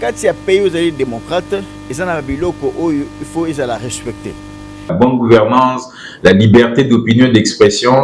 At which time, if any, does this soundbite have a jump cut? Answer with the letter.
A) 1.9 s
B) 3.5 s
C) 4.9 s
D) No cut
C